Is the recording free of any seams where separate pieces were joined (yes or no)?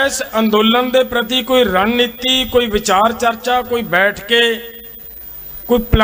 yes